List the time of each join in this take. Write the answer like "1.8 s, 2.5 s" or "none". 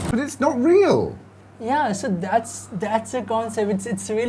none